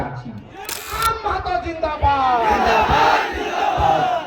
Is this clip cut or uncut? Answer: cut